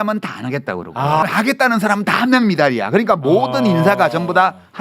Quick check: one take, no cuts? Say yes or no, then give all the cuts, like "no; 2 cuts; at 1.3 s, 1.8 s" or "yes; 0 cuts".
no; 1 cut; at 1.2 s